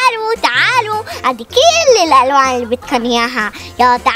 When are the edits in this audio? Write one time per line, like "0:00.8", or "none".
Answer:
none